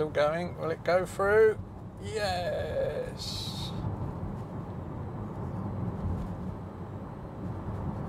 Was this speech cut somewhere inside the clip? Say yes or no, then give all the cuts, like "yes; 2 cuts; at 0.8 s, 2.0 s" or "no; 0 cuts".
no; 0 cuts